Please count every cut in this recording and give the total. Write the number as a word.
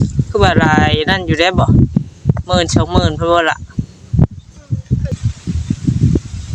one